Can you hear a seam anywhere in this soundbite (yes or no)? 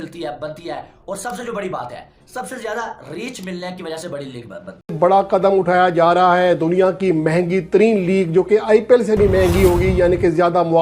yes